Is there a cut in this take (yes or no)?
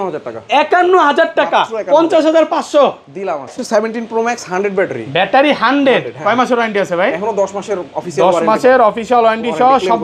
yes